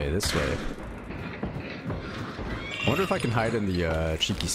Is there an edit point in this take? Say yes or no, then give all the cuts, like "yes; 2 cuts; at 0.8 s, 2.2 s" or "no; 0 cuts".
yes; 1 cut; at 1.1 s